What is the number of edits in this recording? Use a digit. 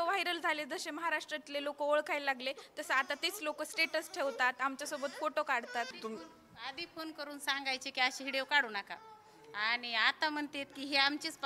1